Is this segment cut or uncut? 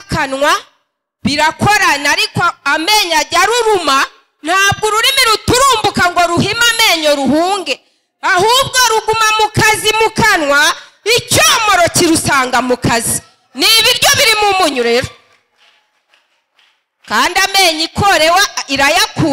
uncut